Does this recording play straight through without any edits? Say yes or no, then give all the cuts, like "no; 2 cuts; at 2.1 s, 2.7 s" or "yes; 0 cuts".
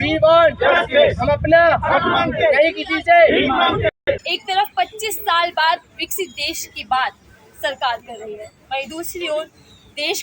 no; 1 cut; at 3.9 s